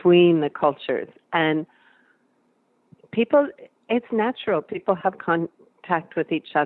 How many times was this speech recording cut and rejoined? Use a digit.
0